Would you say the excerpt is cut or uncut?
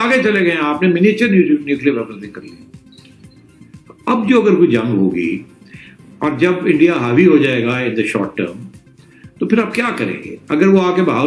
uncut